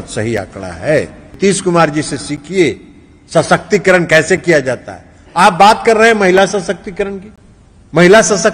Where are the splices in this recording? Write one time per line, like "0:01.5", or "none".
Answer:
0:01.2